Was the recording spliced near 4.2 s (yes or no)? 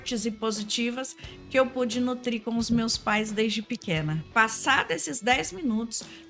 yes